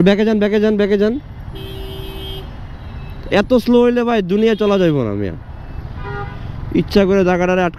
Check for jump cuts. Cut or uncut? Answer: uncut